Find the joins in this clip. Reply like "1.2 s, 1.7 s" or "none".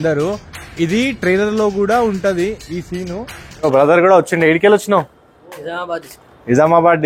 3.6 s

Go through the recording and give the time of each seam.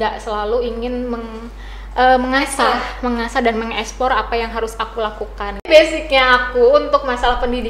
5.6 s

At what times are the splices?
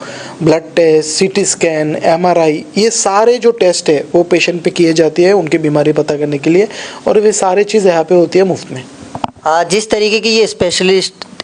none

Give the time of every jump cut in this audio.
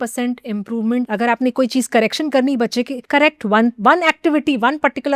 1.1 s, 3.0 s

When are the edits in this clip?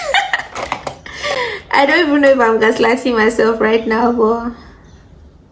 none

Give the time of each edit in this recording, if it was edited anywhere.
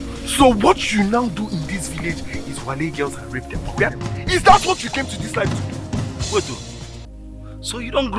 4.3 s

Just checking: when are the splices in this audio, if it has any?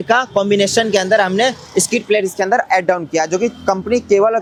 none

